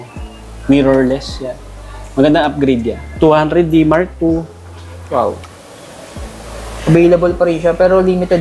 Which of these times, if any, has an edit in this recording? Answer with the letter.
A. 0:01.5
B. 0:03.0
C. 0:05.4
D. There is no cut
D